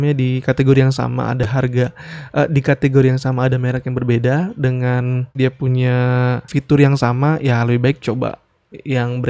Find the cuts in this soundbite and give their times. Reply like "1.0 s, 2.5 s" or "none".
5.4 s, 6.5 s